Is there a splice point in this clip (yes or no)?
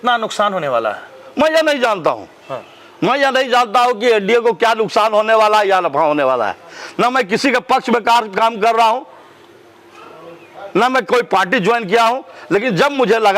no